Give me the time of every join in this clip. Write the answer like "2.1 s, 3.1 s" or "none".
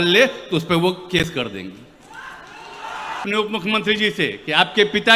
3.2 s